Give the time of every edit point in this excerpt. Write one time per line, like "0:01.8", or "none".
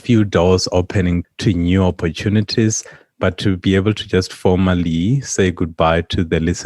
0:01.3